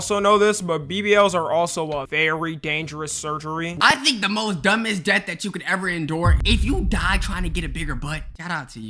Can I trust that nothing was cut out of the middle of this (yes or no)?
no